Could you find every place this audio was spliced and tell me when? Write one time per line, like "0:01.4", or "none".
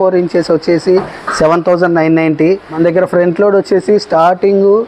0:02.7